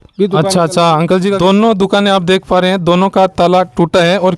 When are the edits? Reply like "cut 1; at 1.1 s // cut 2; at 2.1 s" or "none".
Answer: cut 1; at 1.4 s